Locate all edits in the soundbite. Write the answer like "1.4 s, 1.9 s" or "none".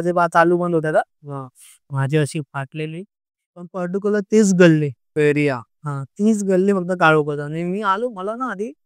3.7 s